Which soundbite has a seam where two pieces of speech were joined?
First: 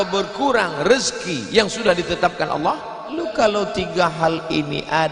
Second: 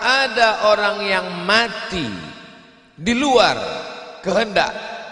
first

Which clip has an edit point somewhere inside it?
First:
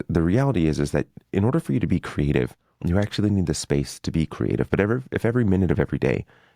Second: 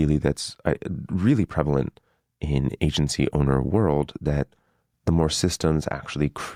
first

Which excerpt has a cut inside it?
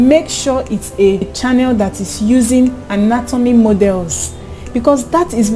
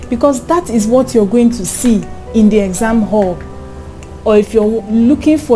first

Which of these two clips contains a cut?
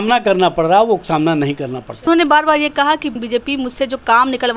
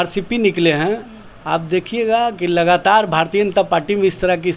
first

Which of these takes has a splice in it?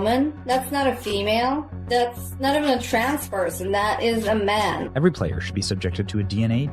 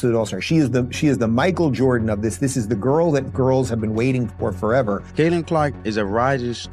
second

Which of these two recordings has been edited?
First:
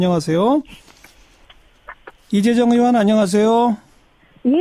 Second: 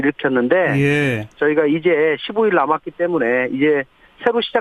second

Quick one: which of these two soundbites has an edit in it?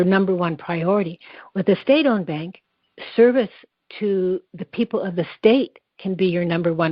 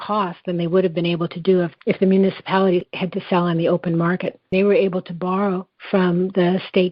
second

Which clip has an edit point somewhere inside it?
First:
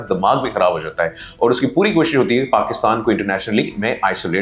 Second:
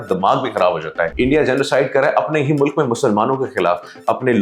second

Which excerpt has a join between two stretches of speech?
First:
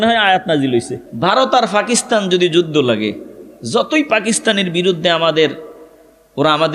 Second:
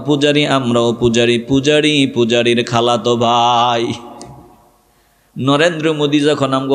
first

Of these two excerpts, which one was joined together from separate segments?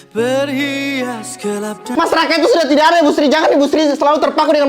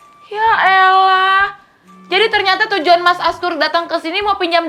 first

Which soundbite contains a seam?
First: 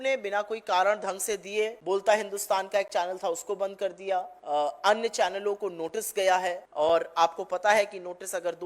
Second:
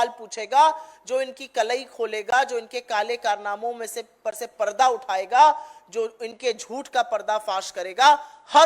first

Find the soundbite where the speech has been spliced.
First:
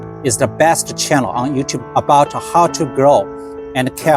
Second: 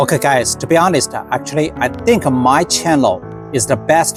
first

